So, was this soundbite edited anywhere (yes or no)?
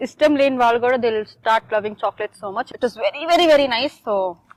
no